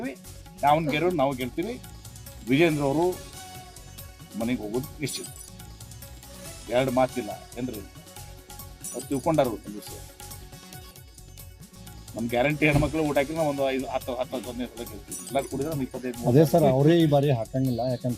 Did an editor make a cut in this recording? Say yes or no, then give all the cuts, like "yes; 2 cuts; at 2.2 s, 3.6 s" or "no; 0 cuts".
no; 0 cuts